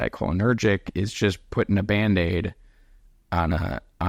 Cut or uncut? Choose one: uncut